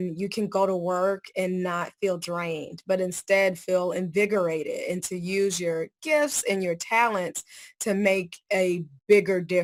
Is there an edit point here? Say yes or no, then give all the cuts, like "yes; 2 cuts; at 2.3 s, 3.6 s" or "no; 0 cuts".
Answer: no; 0 cuts